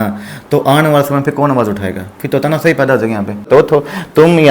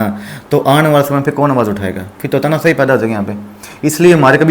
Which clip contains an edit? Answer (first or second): first